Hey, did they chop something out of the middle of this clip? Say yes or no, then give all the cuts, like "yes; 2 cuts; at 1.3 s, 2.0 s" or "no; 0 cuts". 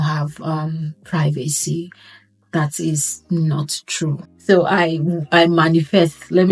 yes; 1 cut; at 4.3 s